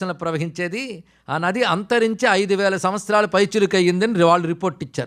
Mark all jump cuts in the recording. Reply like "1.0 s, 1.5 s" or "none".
none